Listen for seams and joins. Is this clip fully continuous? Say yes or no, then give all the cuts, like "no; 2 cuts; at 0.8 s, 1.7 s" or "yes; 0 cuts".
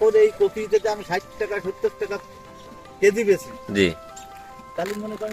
yes; 0 cuts